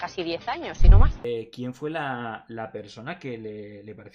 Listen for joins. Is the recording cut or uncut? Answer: cut